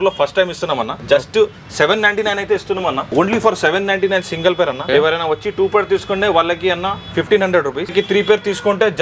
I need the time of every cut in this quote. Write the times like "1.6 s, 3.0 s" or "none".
1.0 s, 3.1 s, 4.8 s, 7.9 s